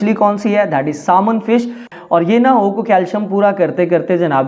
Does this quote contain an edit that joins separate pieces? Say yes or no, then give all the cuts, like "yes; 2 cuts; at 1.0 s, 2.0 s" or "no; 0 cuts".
yes; 1 cut; at 1.9 s